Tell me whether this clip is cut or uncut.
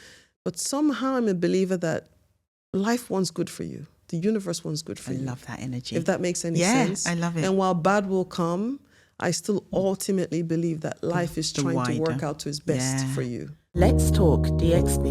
cut